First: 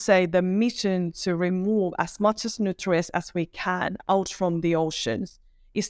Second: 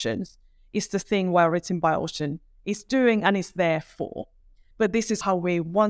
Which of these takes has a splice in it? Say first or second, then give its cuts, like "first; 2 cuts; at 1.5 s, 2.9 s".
second; 1 cut; at 4.9 s